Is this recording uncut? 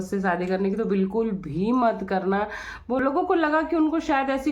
no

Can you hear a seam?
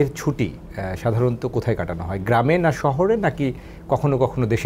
no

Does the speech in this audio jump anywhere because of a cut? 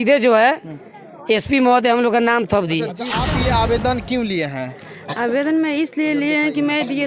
yes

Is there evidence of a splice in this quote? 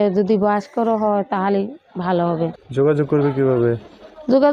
yes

